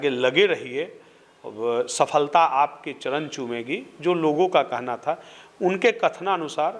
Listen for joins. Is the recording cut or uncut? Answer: uncut